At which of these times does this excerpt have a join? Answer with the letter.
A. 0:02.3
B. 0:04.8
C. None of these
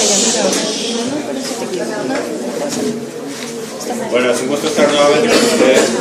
C